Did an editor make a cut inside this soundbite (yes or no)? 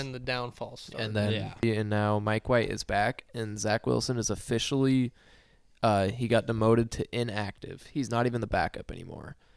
yes